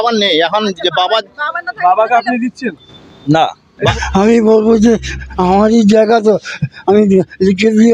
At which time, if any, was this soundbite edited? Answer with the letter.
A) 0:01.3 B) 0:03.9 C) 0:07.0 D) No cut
B